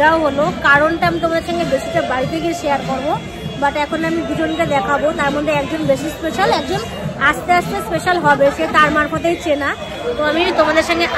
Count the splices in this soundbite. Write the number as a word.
zero